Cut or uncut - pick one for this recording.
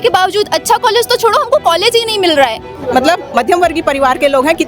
cut